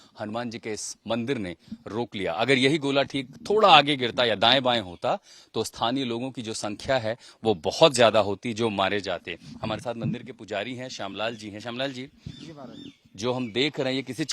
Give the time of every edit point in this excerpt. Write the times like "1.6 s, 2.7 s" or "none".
none